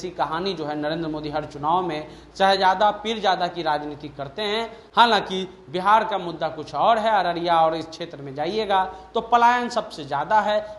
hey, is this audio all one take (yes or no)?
yes